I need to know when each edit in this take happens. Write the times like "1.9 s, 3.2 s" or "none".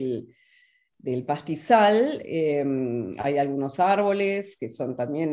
none